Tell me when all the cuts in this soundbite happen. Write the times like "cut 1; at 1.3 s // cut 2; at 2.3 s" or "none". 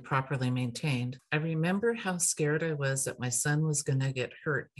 cut 1; at 1.1 s